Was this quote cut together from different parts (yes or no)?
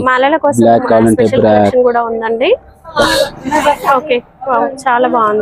yes